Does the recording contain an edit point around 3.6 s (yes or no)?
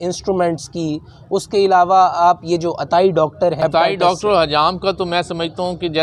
yes